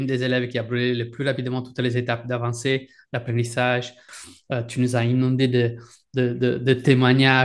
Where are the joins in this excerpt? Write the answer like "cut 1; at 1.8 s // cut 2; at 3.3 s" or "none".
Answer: cut 1; at 4.1 s

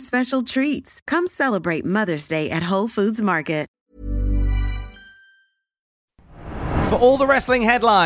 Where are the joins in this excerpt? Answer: none

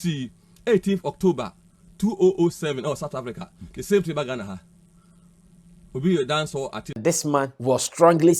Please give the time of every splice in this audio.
cut 1; at 6.8 s // cut 2; at 7.5 s

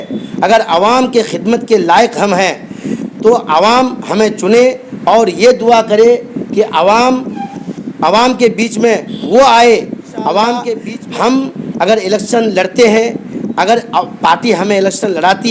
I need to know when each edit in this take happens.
cut 1; at 10.8 s

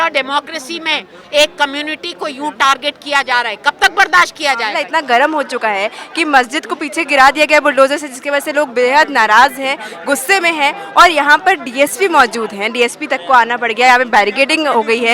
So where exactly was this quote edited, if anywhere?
none

